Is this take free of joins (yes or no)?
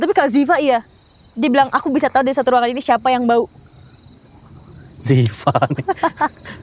yes